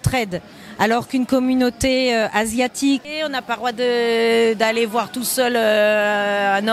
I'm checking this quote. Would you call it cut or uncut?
cut